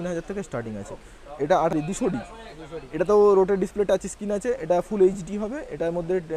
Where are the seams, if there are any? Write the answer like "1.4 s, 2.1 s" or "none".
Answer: 1.7 s